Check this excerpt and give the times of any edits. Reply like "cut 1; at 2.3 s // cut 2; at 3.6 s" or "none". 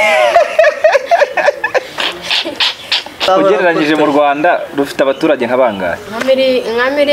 cut 1; at 3.3 s